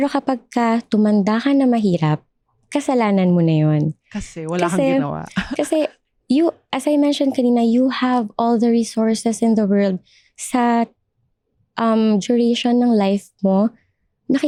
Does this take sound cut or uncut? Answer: uncut